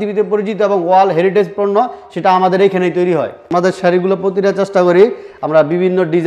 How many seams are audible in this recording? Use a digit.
1